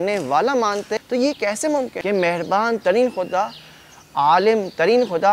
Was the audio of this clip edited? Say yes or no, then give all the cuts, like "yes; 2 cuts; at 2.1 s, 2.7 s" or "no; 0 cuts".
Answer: yes; 2 cuts; at 1.0 s, 2.0 s